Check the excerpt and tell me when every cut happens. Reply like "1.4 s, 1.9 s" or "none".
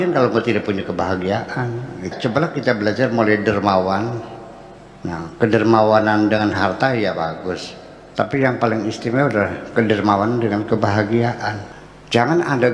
2.1 s, 11.6 s